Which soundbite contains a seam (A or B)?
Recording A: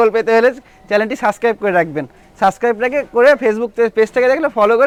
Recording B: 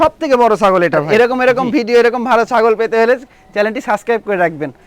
B